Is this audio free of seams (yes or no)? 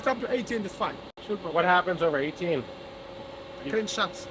no